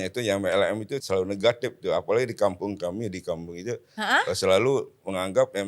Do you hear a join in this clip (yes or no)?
yes